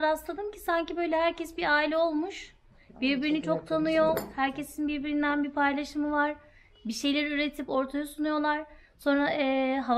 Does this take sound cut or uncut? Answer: uncut